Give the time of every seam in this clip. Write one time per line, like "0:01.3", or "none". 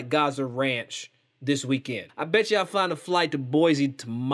0:02.1

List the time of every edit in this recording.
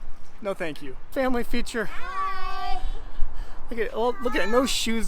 0:01.1

